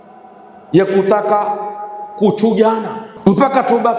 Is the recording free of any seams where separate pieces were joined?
no; 1 cut; at 3.0 s

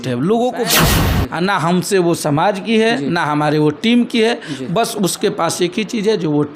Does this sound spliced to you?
yes; 1 cut; at 1.1 s

